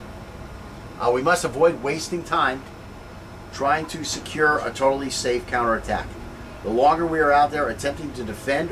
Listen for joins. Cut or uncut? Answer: uncut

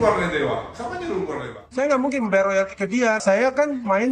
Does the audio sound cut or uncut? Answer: cut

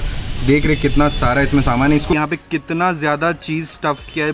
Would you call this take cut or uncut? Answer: cut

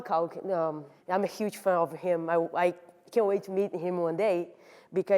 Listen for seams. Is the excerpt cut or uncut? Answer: cut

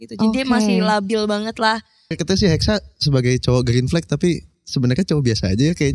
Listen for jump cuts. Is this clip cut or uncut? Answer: cut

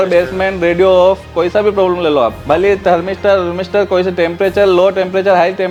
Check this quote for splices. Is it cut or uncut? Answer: uncut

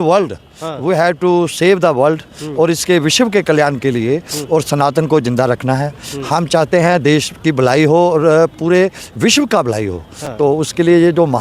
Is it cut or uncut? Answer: uncut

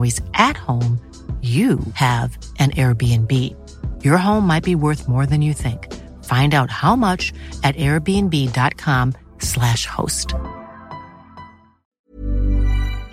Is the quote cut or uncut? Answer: cut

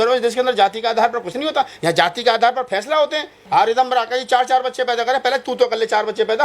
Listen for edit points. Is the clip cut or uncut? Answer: cut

